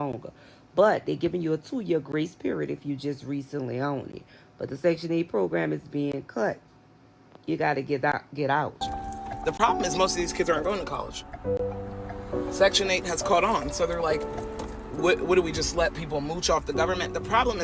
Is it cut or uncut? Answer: cut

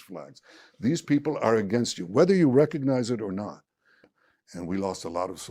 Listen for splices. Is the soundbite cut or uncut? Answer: cut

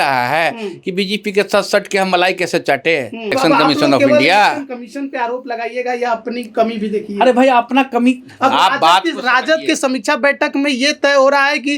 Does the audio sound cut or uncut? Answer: cut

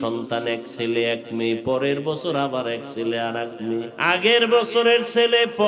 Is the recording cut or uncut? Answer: cut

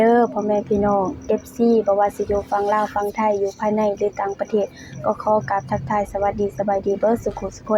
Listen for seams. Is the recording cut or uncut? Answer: uncut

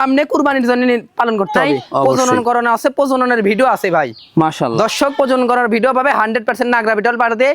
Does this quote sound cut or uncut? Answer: cut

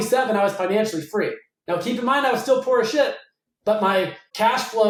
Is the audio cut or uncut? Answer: uncut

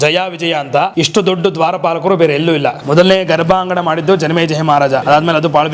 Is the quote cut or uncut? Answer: cut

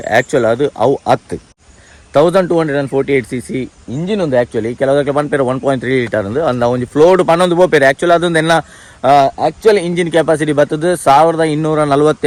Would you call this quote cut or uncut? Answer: uncut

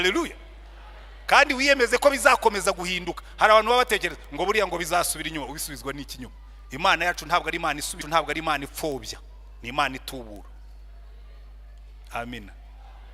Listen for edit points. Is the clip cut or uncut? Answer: cut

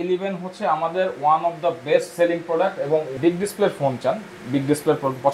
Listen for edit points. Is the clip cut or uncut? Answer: cut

